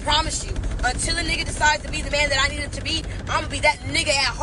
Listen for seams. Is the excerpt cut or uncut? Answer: uncut